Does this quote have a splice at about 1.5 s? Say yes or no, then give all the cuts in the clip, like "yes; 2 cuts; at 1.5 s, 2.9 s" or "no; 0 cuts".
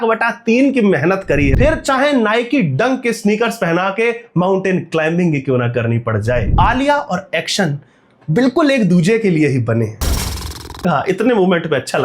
yes; 3 cuts; at 1.5 s, 6.5 s, 10.0 s